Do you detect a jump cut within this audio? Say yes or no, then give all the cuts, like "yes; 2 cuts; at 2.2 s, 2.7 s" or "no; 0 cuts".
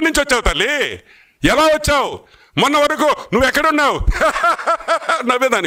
no; 0 cuts